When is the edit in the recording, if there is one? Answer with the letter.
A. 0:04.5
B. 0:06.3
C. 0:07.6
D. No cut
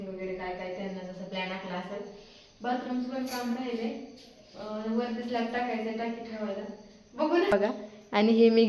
C